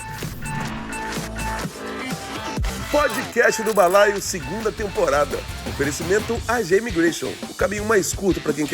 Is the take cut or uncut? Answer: cut